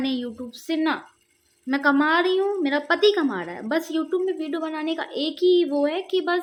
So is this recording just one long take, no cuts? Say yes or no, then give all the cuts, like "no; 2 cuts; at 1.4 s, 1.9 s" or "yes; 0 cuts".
yes; 0 cuts